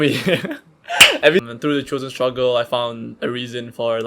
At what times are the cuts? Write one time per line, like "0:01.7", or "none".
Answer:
0:01.4